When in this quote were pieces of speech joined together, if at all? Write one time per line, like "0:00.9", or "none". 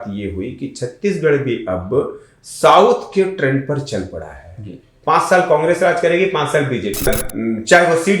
0:07.1

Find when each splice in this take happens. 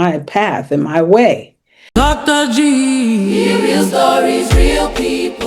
0:01.9

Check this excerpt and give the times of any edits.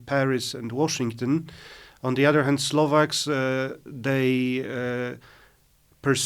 none

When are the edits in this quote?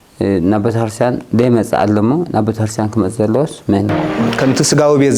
0:04.2

